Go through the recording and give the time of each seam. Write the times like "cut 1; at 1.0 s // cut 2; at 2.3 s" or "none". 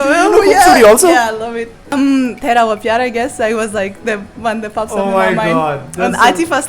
cut 1; at 1.9 s

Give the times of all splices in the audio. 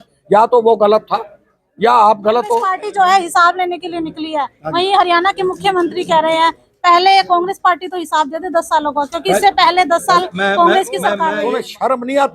cut 1; at 2.8 s // cut 2; at 11.4 s

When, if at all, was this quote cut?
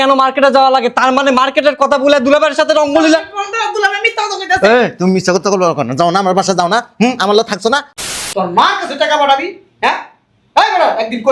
cut 1; at 8.0 s

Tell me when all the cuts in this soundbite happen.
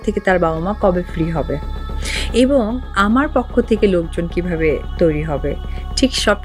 none

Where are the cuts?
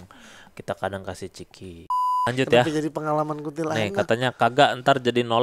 cut 1; at 2.2 s

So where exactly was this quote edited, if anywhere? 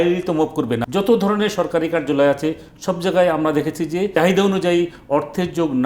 cut 1; at 0.8 s // cut 2; at 4.1 s

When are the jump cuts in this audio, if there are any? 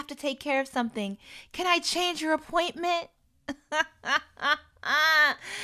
none

